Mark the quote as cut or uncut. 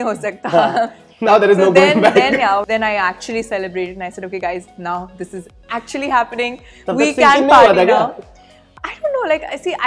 uncut